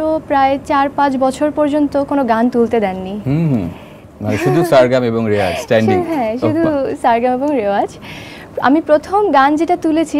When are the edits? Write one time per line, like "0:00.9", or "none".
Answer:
none